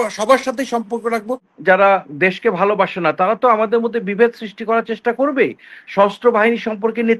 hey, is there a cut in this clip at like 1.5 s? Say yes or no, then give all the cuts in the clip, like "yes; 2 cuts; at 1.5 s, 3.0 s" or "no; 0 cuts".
yes; 1 cut; at 1.5 s